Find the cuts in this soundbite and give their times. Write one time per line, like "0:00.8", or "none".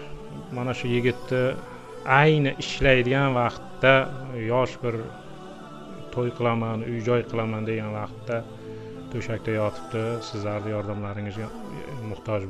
none